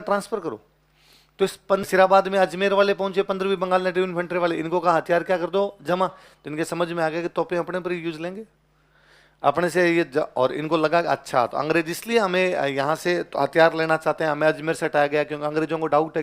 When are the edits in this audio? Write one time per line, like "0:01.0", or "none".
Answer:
0:01.8